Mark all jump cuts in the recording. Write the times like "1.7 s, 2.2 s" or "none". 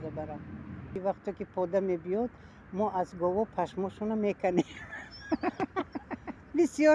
1.0 s